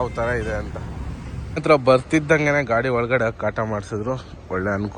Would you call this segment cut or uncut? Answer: cut